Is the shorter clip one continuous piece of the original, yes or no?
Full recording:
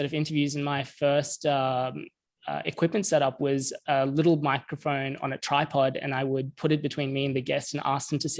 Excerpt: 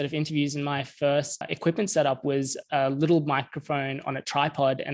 no